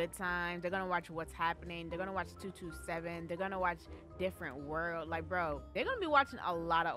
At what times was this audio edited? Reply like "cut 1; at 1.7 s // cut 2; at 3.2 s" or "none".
cut 1; at 5.7 s